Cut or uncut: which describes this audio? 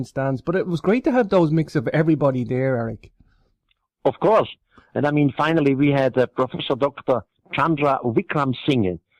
cut